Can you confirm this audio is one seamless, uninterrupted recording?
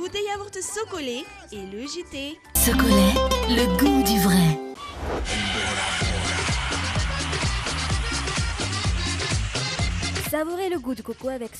yes; 0 cuts

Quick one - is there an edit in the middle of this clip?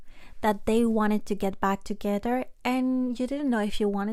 no; 0 cuts

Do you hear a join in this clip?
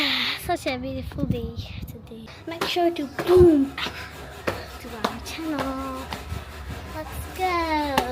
yes; 1 cut; at 2.3 s

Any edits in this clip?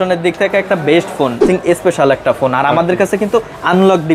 yes; 1 cut; at 1.4 s

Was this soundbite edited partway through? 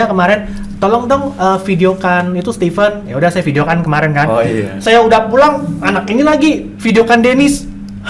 no; 0 cuts

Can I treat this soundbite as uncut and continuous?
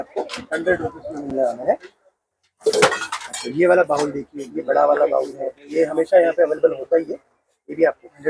yes; 0 cuts

